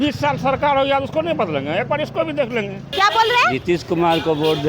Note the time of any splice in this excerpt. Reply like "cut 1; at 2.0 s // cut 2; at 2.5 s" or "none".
cut 1; at 2.8 s